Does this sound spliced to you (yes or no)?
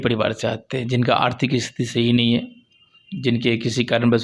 no